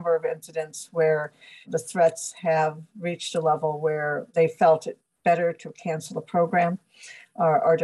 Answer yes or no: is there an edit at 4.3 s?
yes